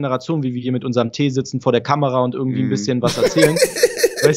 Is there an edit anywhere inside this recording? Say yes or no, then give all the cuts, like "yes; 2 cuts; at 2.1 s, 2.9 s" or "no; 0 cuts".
no; 0 cuts